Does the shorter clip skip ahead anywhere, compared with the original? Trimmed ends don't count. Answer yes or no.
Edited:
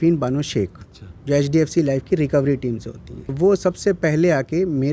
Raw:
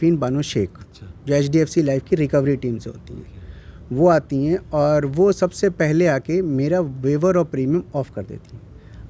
yes